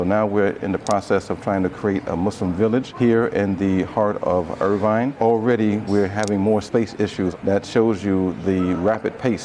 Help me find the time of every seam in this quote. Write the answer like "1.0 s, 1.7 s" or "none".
none